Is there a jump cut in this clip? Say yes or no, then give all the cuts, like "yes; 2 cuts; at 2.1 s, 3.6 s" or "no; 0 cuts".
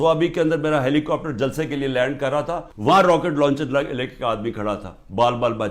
yes; 1 cut; at 2.7 s